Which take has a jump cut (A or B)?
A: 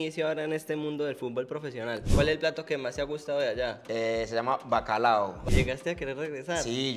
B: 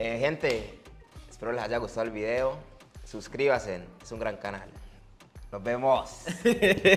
A